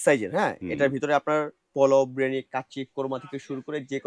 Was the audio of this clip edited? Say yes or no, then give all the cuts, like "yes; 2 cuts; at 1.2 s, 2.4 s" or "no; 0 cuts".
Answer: no; 0 cuts